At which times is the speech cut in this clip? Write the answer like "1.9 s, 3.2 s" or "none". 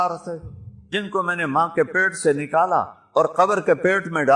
none